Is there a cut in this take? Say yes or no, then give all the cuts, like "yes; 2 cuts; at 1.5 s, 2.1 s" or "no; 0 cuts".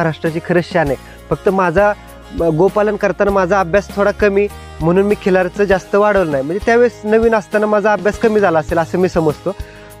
no; 0 cuts